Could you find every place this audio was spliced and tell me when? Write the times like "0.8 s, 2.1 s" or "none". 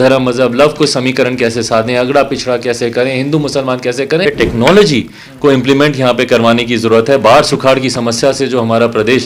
4.2 s